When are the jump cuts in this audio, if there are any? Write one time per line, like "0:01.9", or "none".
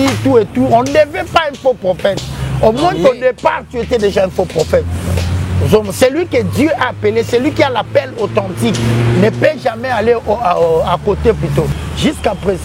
0:11.7